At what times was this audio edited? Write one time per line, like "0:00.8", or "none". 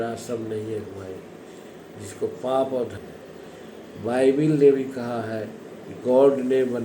0:02.9